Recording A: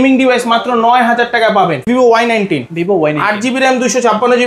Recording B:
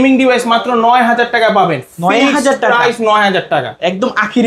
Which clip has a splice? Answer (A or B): A